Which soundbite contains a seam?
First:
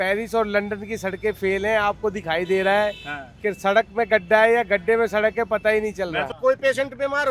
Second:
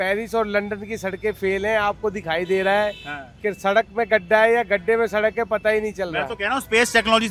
first; 1 cut; at 6.3 s

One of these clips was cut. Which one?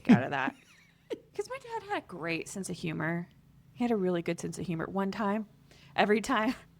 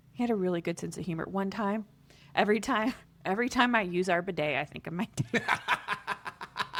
first; 1 cut; at 1.3 s

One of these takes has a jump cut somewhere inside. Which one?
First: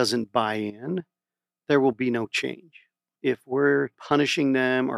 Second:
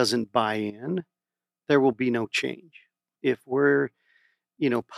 first; 1 cut; at 4.0 s

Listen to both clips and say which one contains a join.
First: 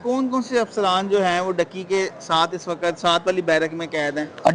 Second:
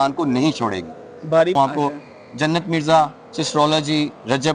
second; 1 cut; at 1.5 s

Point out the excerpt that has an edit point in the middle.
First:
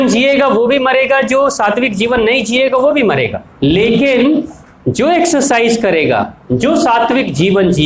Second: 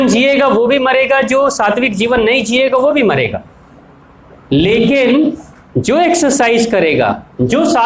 first; 1 cut; at 3.4 s

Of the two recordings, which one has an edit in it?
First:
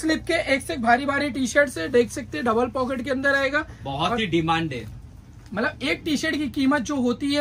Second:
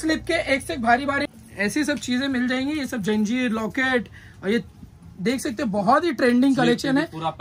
second; 1 cut; at 1.3 s

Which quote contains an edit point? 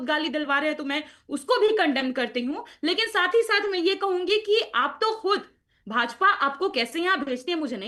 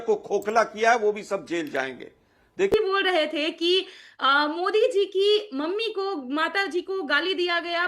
second; 1 cut; at 2.7 s

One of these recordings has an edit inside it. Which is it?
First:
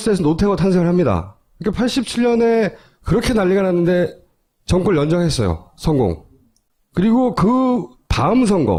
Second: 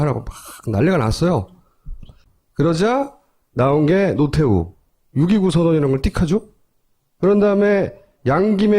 second; 1 cut; at 4.0 s

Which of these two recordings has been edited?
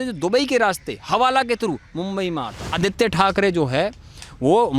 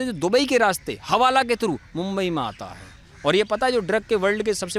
first; 1 cut; at 2.8 s

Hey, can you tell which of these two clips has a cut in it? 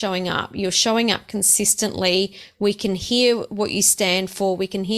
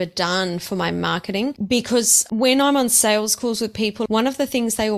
second; 3 cuts; at 1.6 s, 2.2 s, 4.0 s

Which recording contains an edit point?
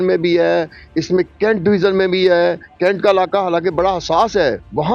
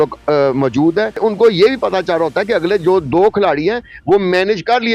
second; 1 cut; at 1.2 s

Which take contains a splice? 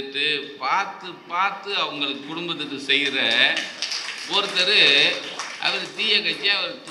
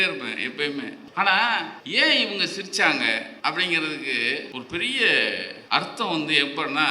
second; 5 cuts; at 1.0 s, 1.8 s, 3.3 s, 4.5 s, 5.5 s

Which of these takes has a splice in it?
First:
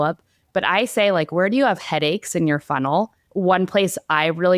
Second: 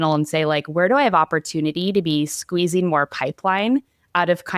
first; 1 cut; at 3.2 s

